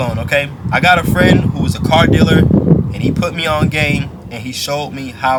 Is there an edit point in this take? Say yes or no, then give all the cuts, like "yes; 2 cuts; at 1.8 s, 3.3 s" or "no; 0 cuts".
no; 0 cuts